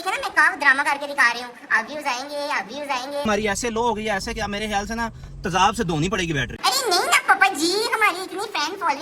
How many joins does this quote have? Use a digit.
2